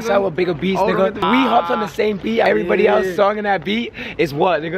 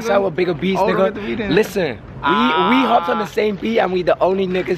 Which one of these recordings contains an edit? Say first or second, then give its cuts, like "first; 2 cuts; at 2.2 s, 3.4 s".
first; 2 cuts; at 1.2 s, 2.5 s